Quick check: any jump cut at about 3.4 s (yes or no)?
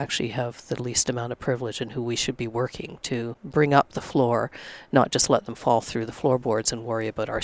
yes